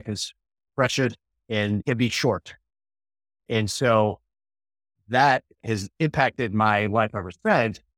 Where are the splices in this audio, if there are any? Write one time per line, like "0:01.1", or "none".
0:01.8
0:05.5